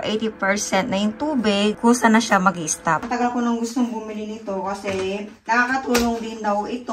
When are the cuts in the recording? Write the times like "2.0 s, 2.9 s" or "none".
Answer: 3.0 s